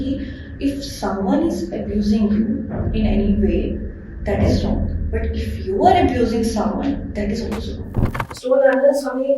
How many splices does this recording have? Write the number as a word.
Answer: one